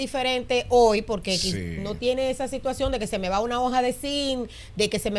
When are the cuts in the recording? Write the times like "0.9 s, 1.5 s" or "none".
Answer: none